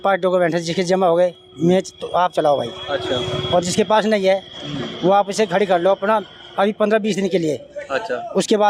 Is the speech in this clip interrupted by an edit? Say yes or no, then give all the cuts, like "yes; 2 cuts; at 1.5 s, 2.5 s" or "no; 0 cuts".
no; 0 cuts